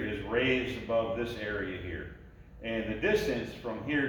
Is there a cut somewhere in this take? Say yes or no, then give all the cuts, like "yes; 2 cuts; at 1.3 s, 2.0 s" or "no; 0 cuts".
no; 0 cuts